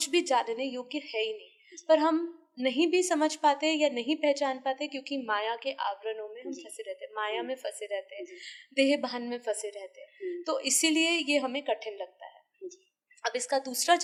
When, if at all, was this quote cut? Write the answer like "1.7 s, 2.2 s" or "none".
none